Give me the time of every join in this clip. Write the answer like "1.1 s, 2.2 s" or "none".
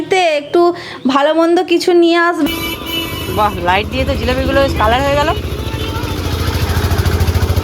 2.5 s